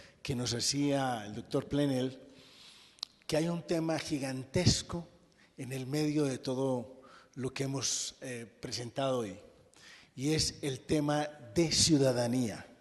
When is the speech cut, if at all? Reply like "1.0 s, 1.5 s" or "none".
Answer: 2.3 s